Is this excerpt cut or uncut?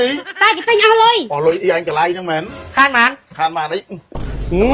cut